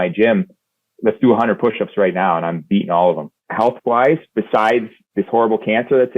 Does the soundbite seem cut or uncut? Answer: cut